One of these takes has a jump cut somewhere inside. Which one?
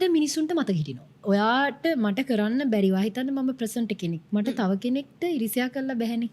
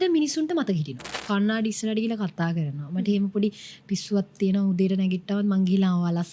second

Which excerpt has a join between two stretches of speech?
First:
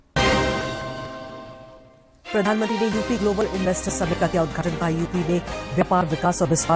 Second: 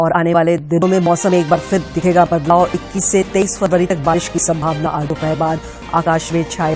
first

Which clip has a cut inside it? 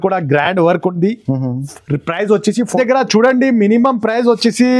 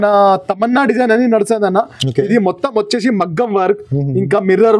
first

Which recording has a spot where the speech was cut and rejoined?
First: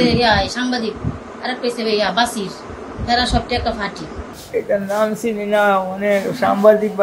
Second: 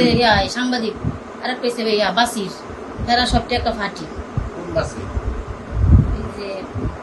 first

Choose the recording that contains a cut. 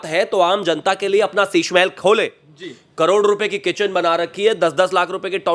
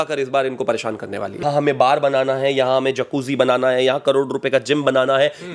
second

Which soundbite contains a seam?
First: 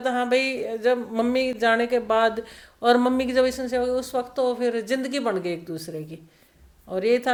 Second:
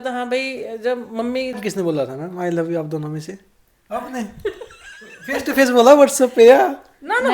second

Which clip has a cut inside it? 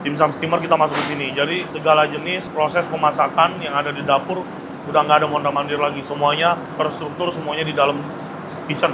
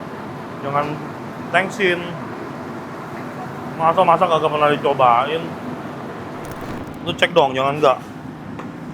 second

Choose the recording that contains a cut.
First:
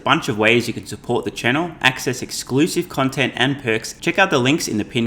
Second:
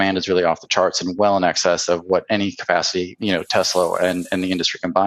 first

